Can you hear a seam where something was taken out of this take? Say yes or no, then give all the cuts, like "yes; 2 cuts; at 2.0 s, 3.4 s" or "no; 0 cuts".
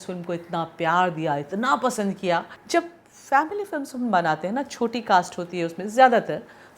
yes; 1 cut; at 2.6 s